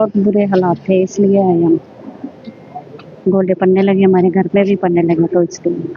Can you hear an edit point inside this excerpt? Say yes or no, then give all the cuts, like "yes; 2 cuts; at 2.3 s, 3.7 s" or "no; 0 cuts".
no; 0 cuts